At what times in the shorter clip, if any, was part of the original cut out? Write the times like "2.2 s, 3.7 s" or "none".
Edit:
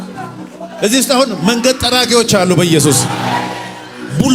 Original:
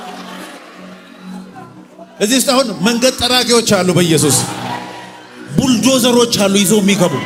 none